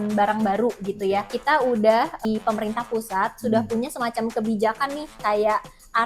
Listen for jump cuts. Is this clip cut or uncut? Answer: cut